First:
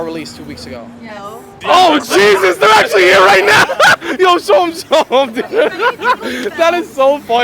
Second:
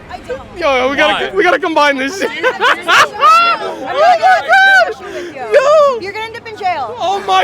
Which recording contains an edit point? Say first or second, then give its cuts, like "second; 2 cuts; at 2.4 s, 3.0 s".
first; 1 cut; at 1.6 s